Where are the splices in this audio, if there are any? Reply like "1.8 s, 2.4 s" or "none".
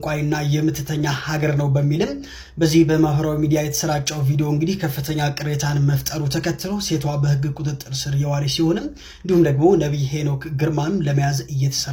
none